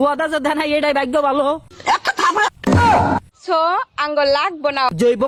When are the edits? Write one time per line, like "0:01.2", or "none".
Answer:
none